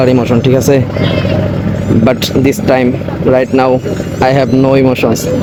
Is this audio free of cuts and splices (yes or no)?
yes